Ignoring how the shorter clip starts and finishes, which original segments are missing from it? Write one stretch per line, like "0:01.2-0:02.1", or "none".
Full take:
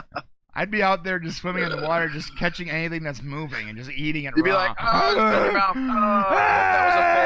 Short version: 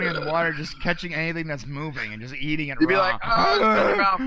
none